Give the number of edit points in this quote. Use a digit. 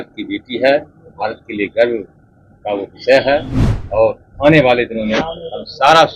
0